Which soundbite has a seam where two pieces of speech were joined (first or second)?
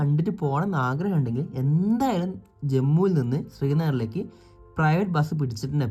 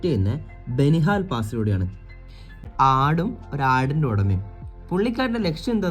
second